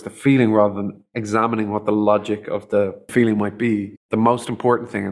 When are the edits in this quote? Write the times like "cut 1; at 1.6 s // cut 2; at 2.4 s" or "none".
cut 1; at 3.1 s // cut 2; at 4.0 s